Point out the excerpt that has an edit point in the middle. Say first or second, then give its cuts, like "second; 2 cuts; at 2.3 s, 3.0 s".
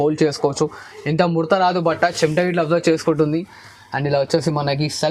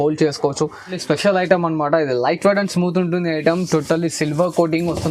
second; 1 cut; at 1.0 s